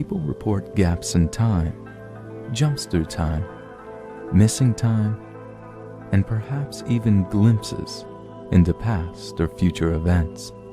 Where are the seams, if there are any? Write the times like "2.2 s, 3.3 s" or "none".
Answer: 1.5 s

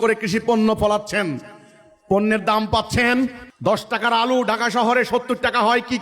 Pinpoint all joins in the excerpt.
3.5 s

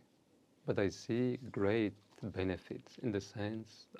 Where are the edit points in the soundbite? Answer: none

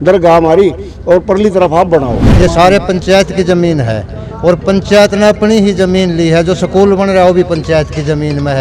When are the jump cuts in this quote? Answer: 2.2 s

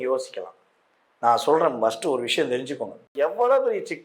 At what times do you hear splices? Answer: 3.1 s

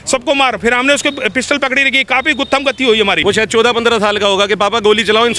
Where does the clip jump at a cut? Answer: 3.2 s

